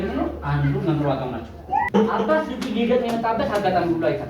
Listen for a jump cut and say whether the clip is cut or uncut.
cut